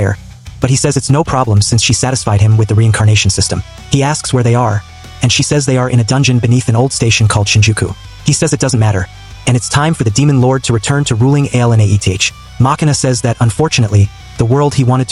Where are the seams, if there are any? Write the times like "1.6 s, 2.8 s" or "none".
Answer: none